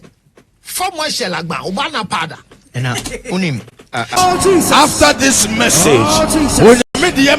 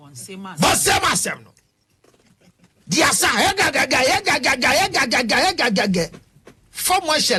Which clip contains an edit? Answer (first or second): first